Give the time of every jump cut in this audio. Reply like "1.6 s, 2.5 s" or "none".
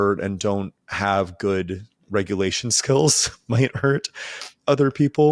none